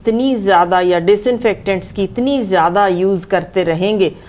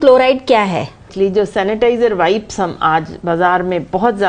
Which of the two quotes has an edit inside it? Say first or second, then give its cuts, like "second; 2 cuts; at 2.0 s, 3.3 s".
second; 1 cut; at 1.1 s